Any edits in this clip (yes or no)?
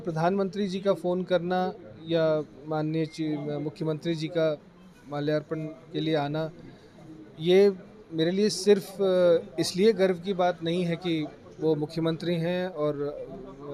no